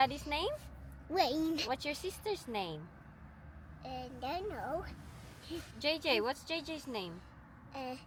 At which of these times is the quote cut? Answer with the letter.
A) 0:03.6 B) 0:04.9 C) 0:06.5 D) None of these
D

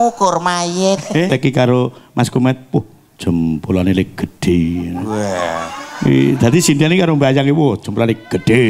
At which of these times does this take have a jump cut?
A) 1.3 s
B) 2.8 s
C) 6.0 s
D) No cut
A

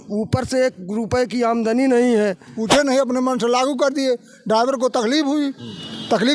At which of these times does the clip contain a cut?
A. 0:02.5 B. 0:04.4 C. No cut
A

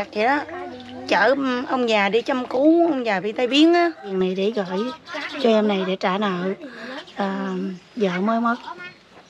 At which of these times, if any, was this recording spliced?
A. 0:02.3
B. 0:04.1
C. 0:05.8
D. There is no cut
B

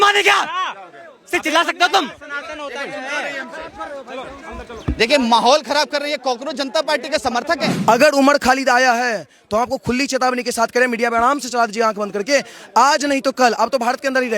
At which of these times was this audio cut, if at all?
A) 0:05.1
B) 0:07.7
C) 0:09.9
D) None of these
B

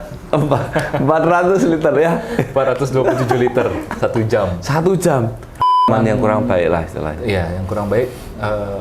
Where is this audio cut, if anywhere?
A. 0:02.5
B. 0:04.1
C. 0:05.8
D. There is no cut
C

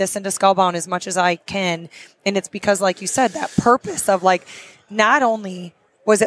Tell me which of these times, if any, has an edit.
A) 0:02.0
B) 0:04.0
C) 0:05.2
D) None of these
D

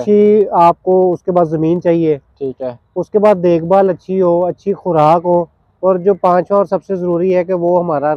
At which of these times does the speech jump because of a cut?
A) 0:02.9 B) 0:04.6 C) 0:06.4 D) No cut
D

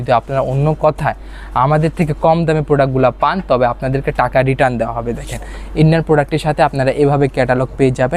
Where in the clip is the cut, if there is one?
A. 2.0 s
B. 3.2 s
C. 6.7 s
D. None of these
D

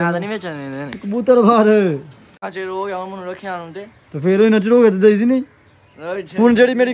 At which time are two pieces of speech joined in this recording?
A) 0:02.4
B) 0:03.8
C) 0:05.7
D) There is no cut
A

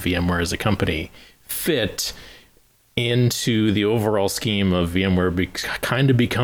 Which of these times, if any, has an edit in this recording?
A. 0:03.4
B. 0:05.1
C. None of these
C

